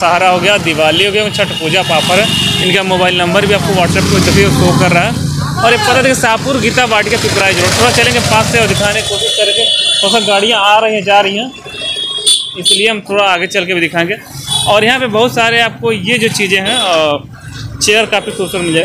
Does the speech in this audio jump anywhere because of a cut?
no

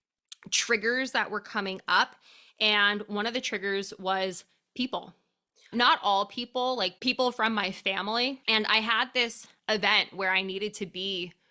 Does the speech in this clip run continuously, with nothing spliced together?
no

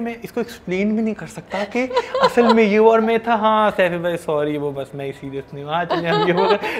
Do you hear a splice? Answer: no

